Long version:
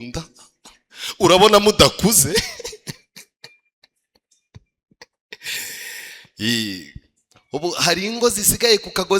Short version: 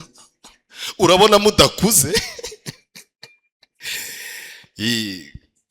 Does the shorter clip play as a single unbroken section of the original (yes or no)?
no